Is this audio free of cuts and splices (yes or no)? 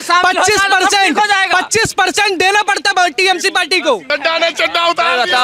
no